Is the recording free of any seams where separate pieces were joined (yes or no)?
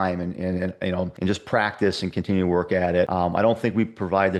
no